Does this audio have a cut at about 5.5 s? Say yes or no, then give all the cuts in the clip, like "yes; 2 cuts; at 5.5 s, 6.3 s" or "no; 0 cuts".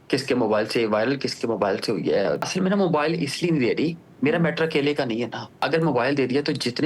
yes; 2 cuts; at 2.5 s, 5.5 s